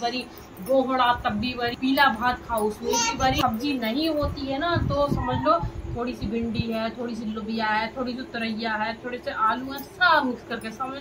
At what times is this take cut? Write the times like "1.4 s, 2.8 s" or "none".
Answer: 1.7 s, 3.4 s

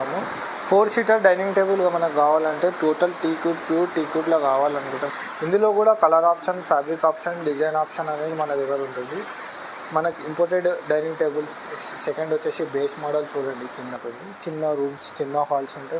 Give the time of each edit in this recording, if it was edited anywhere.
5.1 s, 9.5 s, 14.0 s

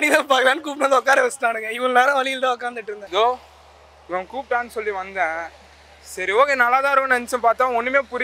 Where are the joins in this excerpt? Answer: 2.9 s

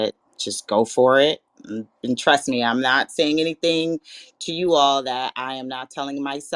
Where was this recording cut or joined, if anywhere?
none

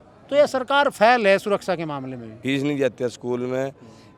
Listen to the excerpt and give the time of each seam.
2.3 s

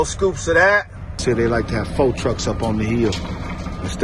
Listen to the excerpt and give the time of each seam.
1.2 s

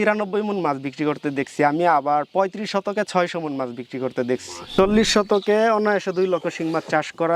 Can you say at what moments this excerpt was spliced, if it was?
4.6 s

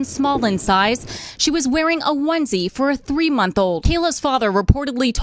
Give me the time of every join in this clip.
3.8 s

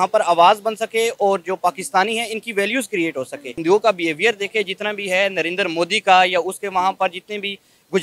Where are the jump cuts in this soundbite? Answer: 3.5 s

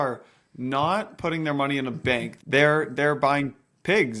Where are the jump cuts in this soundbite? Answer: 2.3 s

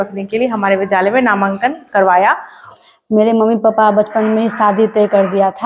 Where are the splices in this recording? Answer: 2.7 s

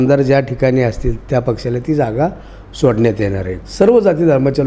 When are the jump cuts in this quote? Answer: 3.5 s

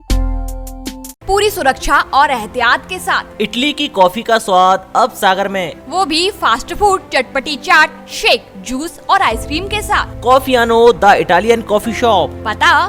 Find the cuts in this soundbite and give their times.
none

